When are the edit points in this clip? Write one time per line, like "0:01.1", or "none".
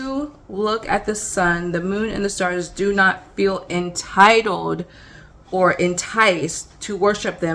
none